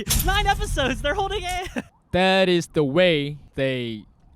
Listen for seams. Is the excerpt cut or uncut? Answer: cut